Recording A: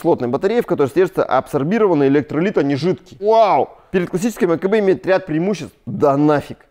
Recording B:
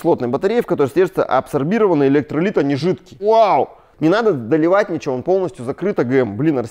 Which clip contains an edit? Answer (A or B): B